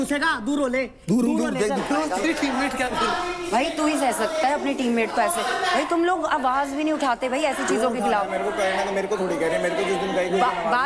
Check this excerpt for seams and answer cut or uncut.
cut